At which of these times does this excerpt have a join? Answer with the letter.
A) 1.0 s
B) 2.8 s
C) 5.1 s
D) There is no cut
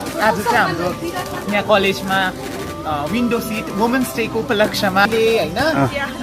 C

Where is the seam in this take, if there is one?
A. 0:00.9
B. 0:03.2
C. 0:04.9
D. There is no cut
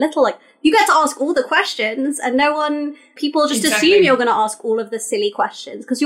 B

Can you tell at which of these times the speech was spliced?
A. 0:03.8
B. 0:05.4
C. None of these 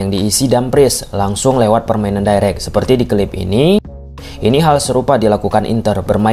A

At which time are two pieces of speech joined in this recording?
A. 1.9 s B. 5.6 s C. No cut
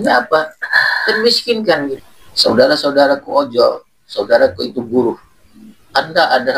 A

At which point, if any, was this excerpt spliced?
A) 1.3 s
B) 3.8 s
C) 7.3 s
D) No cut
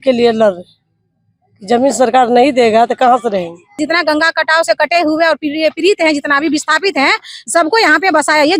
B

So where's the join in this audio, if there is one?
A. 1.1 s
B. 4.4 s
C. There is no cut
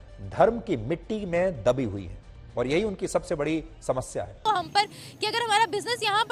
B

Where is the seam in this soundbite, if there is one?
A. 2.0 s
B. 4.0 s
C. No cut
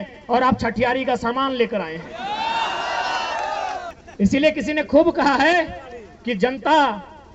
B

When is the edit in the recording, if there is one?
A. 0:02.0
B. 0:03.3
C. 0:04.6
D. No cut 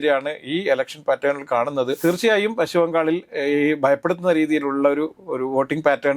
A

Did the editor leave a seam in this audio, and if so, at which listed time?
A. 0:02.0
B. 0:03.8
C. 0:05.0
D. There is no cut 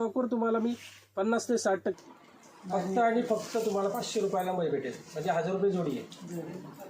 A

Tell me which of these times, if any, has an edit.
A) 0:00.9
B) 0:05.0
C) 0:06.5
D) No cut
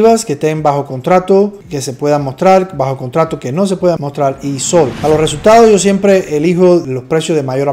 B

